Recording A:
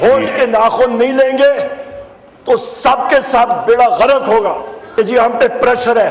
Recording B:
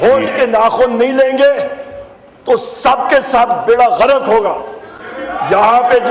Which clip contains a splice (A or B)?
A